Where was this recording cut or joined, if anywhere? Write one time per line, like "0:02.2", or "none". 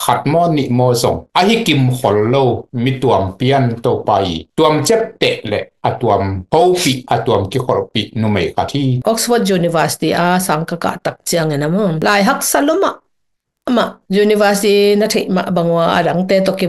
0:09.0